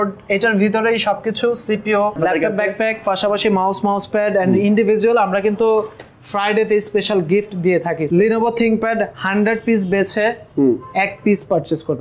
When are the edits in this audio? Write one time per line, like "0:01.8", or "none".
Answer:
0:02.2
0:08.1

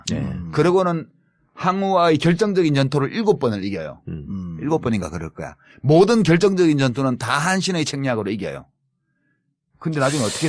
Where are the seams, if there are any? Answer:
0:02.6

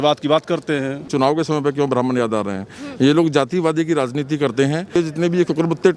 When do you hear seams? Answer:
0:01.0
0:05.0

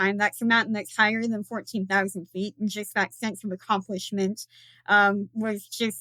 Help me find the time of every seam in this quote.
none

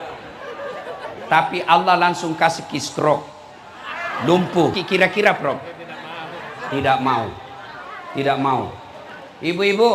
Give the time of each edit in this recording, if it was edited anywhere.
0:04.8

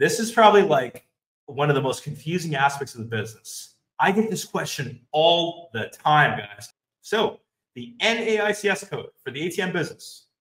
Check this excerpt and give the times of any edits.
0:06.6

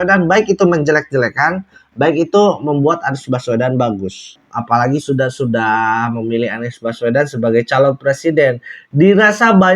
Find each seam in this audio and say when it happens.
0:04.3

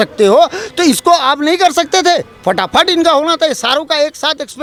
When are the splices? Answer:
none

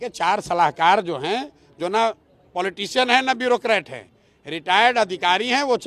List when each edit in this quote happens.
none

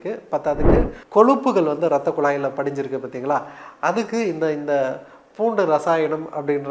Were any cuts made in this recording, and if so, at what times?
0:01.0

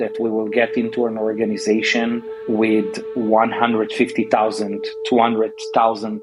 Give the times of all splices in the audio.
none

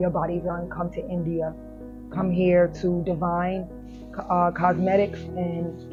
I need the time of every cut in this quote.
none

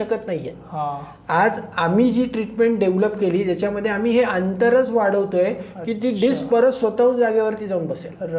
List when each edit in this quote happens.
none

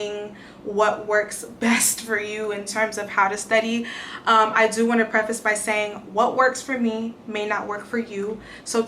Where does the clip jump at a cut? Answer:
none

